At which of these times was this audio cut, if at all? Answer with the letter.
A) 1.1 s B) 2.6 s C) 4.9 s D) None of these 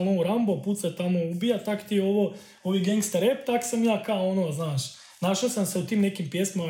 D